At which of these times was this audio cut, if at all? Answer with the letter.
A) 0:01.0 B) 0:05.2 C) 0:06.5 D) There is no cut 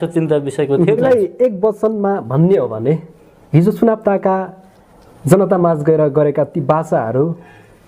A